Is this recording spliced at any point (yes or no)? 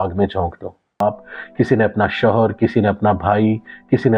yes